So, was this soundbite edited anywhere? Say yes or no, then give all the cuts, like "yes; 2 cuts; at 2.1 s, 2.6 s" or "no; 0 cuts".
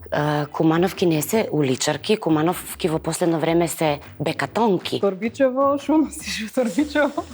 yes; 1 cut; at 4.9 s